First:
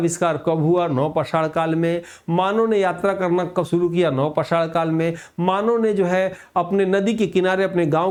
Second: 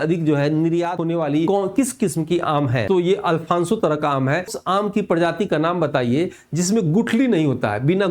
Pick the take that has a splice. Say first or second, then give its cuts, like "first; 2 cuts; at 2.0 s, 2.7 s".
second; 3 cuts; at 1.1 s, 2.8 s, 4.5 s